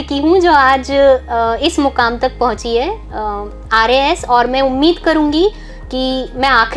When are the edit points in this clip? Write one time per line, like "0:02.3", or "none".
none